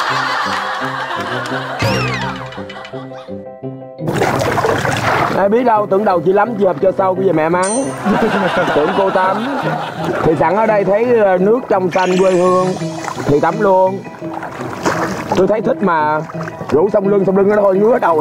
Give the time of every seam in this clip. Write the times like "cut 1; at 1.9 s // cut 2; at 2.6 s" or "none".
none